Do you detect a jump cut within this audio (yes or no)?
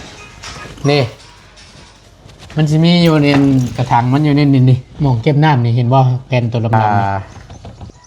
yes